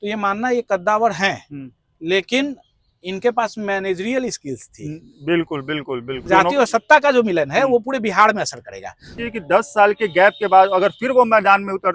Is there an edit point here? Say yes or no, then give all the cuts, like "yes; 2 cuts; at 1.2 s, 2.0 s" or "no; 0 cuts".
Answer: yes; 2 cuts; at 6.2 s, 9.1 s